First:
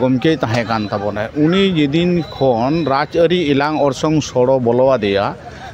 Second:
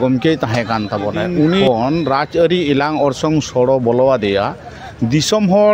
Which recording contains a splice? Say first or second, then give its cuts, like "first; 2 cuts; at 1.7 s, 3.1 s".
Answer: second; 1 cut; at 1.6 s